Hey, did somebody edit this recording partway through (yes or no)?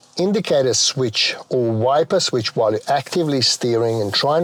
no